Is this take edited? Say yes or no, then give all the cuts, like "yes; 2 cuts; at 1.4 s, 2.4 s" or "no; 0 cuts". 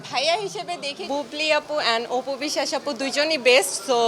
yes; 1 cut; at 1.0 s